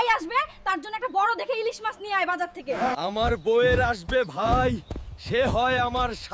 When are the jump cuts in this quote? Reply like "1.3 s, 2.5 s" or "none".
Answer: none